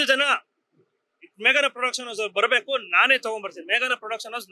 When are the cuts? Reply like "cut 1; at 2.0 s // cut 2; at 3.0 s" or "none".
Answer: none